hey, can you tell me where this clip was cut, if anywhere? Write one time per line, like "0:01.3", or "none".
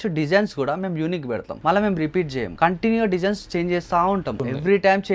0:01.5
0:02.5